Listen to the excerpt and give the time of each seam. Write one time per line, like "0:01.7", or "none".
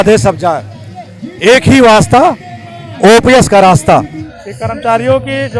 0:04.2